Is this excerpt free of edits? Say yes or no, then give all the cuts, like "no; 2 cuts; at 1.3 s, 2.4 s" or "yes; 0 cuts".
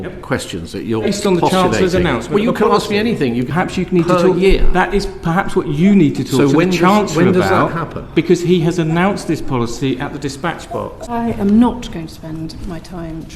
no; 2 cuts; at 3.5 s, 11.0 s